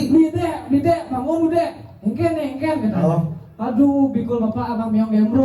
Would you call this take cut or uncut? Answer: uncut